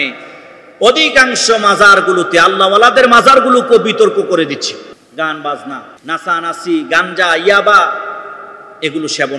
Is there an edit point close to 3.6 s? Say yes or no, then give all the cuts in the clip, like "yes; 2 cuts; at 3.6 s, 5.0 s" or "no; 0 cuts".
no; 2 cuts; at 5.0 s, 5.9 s